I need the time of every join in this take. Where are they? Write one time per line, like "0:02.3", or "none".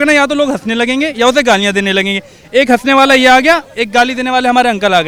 none